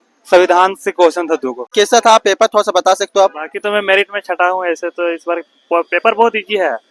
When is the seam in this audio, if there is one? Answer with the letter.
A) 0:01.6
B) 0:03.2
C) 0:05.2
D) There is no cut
A